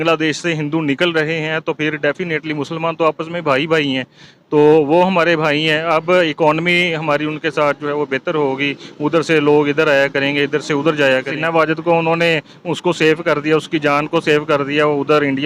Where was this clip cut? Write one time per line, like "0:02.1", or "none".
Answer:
0:11.3